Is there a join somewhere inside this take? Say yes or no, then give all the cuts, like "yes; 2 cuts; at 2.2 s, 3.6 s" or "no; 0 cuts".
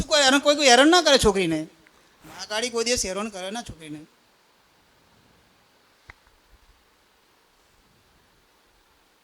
no; 0 cuts